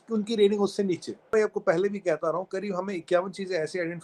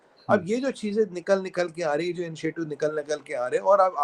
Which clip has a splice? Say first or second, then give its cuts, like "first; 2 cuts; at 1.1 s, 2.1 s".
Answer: first; 1 cut; at 1.3 s